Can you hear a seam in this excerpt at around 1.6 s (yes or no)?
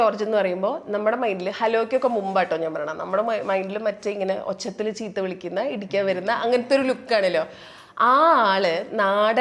no